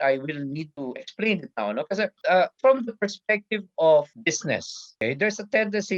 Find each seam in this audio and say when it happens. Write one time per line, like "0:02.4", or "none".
none